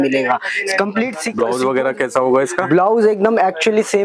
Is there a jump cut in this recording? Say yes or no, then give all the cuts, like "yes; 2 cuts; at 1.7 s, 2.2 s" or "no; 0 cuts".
yes; 1 cut; at 1.3 s